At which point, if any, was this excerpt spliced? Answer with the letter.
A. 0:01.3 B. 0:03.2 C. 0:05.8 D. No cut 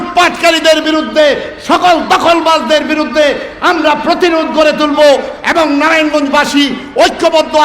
D